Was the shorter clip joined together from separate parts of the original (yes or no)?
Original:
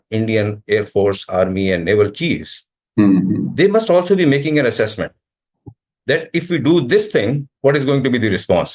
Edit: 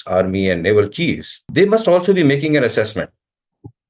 yes